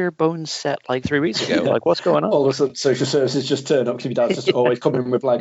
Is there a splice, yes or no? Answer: no